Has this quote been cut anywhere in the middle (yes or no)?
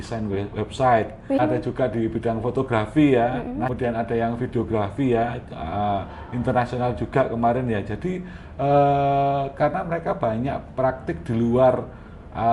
yes